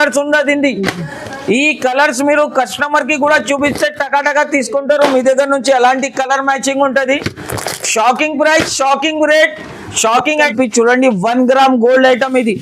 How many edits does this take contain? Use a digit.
1